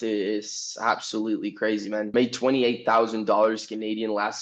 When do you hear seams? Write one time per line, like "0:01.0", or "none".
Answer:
0:02.1